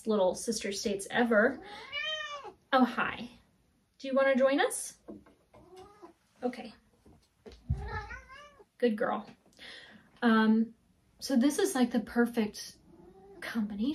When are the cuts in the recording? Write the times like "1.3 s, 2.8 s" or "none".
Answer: none